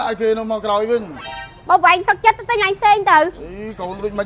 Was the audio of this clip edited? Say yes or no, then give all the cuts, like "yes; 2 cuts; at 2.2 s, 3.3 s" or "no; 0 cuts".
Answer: no; 0 cuts